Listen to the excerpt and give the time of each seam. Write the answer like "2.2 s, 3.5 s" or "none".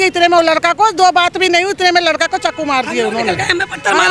none